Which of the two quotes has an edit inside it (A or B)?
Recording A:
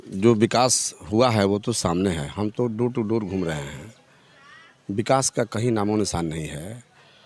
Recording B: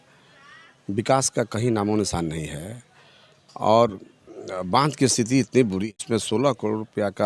B